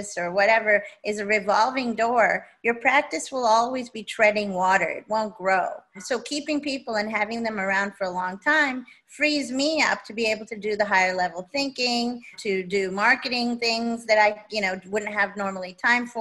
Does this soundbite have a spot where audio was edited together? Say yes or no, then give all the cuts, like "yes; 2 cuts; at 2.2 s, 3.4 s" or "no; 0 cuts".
yes; 2 cuts; at 6.0 s, 12.3 s